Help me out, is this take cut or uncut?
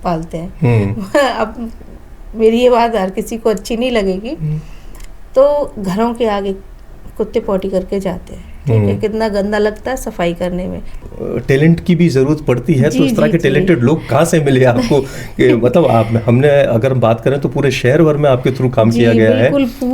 cut